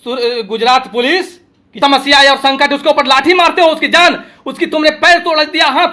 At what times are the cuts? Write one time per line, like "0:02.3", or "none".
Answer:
0:01.7